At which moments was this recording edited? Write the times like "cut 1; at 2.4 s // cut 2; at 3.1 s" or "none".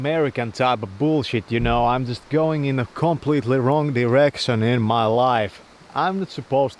none